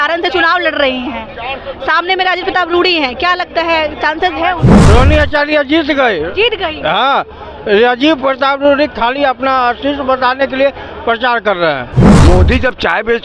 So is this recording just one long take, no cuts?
no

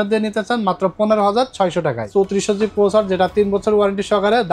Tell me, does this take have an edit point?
yes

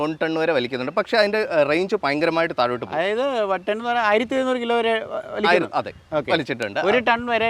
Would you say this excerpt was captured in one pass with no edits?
yes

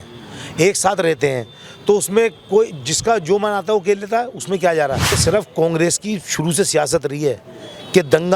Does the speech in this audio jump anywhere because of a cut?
yes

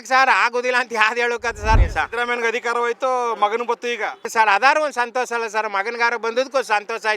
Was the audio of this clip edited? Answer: yes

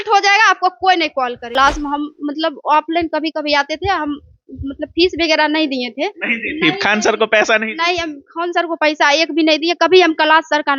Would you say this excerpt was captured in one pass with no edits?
no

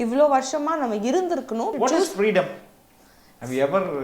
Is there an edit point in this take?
yes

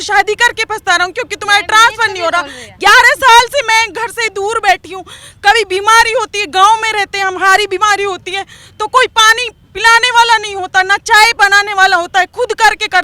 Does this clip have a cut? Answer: no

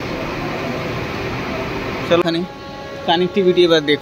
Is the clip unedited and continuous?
no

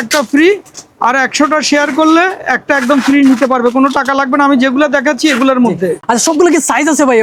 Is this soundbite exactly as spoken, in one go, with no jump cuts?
yes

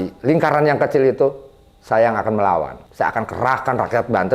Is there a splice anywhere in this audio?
yes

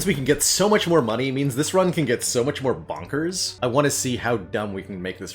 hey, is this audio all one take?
no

